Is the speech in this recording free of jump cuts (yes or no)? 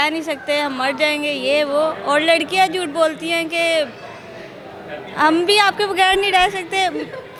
yes